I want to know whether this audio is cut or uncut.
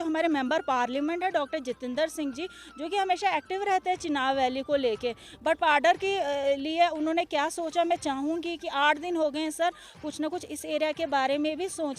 uncut